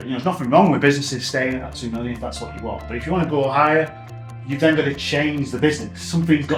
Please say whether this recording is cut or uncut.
uncut